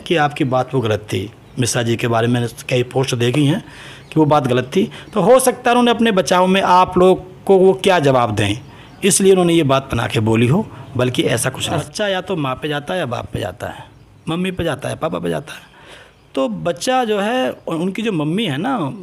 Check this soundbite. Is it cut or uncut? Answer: cut